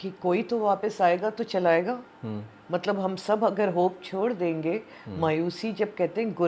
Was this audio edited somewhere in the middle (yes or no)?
no